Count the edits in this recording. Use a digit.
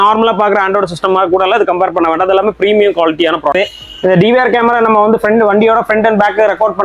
1